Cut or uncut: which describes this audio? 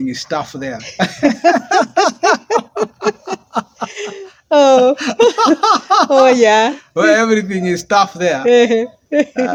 uncut